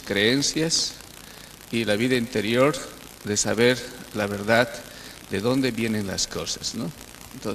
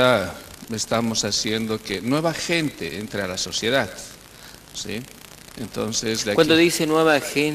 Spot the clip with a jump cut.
first; 1 cut; at 3.2 s

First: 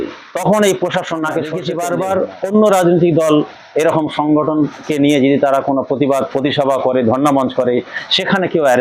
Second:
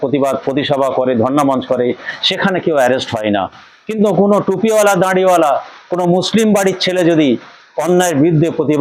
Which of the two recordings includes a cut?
first; 1 cut; at 1.7 s

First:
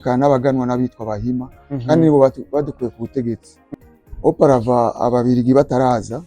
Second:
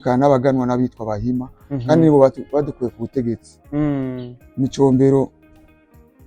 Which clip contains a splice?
first; 1 cut; at 3.6 s

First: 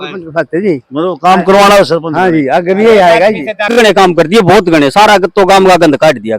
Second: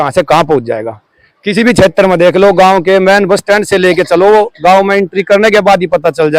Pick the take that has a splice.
first; 1 cut; at 3.7 s

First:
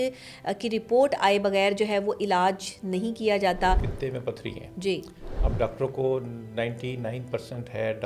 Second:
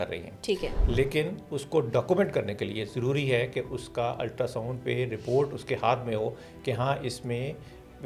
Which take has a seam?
first; 1 cut; at 3.9 s

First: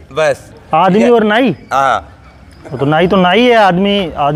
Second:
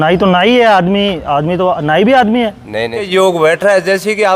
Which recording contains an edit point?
second; 1 cut; at 3.1 s

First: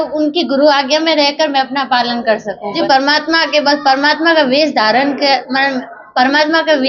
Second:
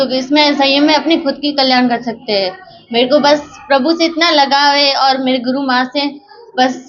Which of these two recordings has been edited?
first; 1 cut; at 2.8 s

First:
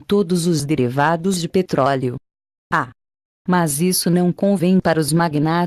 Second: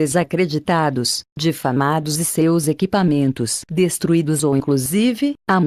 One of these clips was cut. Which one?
first; 1 cut; at 2.9 s

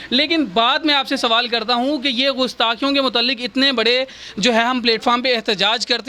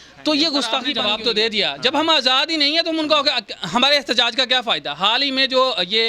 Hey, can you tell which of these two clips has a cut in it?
second; 1 cut; at 0.9 s

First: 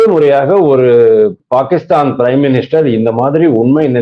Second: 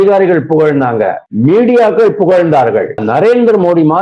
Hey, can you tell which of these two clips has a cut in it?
second; 2 cuts; at 1.2 s, 3.0 s

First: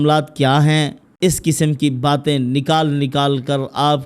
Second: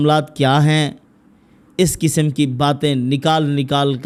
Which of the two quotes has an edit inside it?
first; 1 cut; at 1.0 s

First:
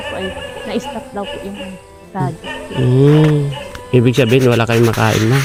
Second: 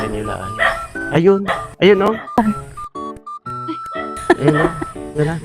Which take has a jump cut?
second; 1 cut; at 1.0 s

